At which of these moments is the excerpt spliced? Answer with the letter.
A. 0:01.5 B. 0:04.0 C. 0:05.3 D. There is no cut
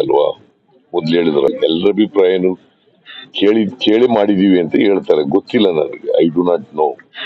A